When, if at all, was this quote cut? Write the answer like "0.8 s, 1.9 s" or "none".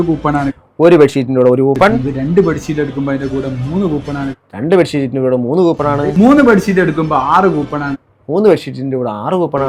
none